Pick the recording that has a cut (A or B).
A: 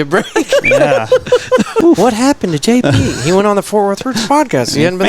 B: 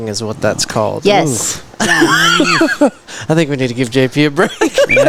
A